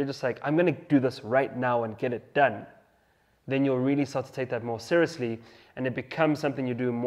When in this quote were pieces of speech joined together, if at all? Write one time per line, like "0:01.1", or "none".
none

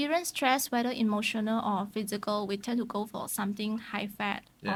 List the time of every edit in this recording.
none

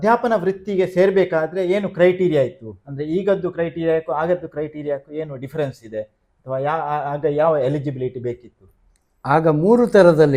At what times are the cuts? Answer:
none

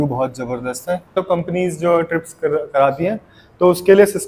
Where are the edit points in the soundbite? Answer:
0:01.1

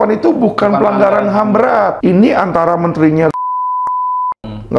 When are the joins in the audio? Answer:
0:02.0

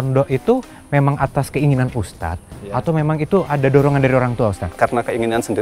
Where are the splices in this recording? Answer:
0:04.7

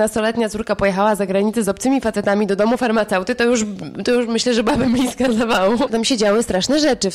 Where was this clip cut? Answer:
0:05.9

